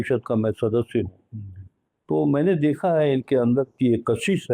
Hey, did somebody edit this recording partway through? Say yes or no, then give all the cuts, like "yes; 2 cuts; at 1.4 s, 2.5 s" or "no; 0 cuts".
no; 0 cuts